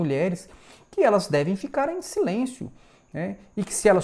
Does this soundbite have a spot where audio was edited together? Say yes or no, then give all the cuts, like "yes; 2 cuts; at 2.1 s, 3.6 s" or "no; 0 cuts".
no; 0 cuts